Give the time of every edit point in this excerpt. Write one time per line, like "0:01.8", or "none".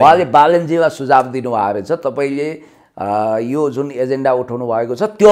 none